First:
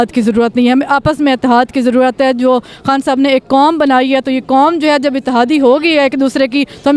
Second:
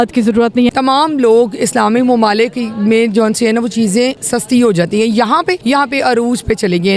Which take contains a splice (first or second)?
second